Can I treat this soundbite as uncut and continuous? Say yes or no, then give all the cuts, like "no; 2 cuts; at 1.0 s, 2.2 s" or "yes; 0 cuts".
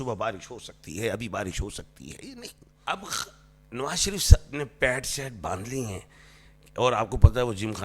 no; 1 cut; at 2.6 s